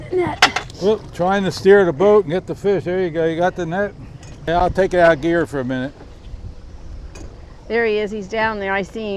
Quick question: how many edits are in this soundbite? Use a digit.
1